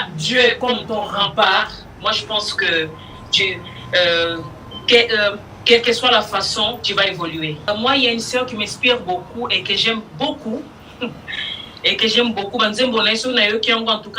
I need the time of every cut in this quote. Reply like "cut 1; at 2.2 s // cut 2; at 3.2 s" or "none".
cut 1; at 7.7 s